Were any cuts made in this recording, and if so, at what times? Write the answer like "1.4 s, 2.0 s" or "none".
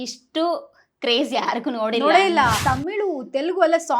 2.6 s